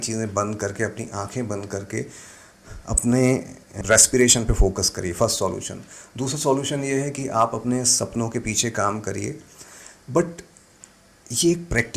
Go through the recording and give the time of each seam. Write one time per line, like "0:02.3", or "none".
0:03.8